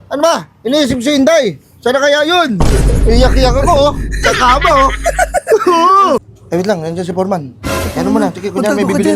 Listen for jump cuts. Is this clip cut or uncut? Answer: cut